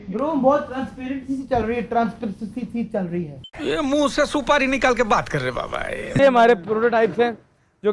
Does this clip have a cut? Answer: yes; 1 cut; at 6.2 s

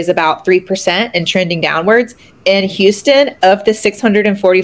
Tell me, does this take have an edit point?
no; 0 cuts

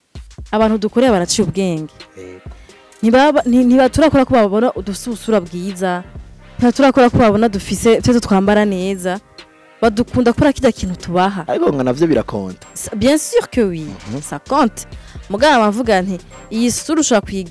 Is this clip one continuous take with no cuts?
yes; 0 cuts

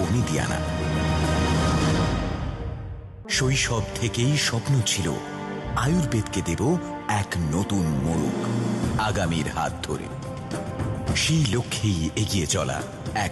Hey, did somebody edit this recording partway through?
no; 0 cuts

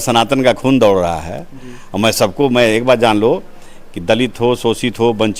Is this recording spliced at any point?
no; 0 cuts

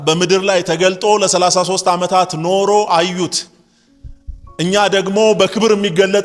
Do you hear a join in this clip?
no; 0 cuts

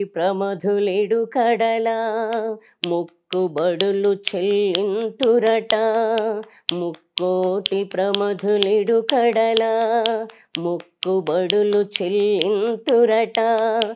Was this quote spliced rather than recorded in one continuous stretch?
no; 0 cuts

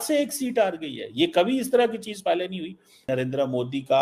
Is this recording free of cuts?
no; 1 cut; at 3.0 s

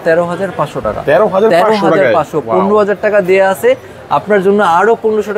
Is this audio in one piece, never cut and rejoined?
yes; 0 cuts

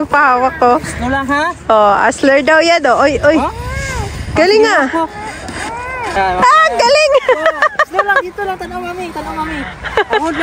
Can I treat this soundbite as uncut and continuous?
no; 1 cut; at 6.2 s

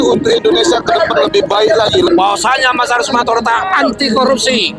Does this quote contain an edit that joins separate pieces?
yes; 1 cut; at 2.1 s

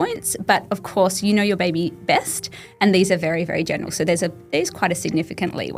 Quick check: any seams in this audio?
no; 0 cuts

